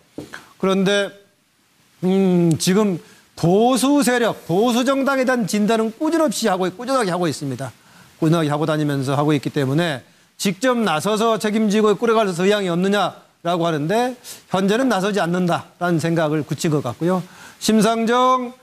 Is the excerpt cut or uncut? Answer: cut